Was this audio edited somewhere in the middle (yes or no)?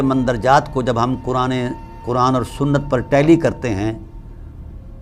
no